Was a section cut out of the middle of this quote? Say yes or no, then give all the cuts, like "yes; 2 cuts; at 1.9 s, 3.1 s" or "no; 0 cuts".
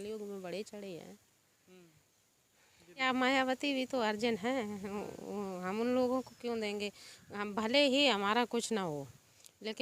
yes; 1 cut; at 3.1 s